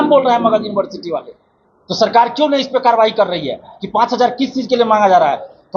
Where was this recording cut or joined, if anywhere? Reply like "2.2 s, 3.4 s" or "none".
none